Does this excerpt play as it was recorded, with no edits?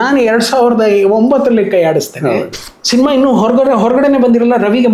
no; 1 cut; at 2.6 s

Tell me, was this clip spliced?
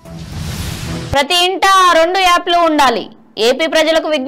no; 0 cuts

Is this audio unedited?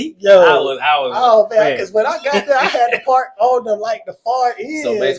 yes; 0 cuts

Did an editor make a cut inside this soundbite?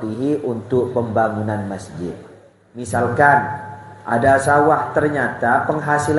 yes; 1 cut; at 2.9 s

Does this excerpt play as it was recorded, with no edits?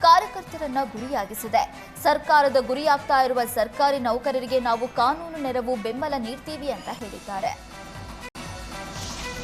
no; 1 cut; at 8.3 s

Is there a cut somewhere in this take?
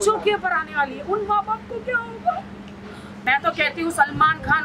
yes; 1 cut; at 3.1 s

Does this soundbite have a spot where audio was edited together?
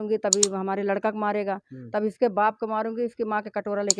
no; 0 cuts

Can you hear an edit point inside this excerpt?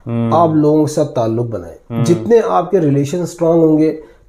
no; 0 cuts

